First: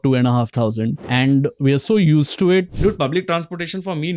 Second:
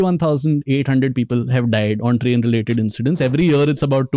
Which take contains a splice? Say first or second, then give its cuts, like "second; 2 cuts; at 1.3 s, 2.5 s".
first; 2 cuts; at 1.0 s, 2.7 s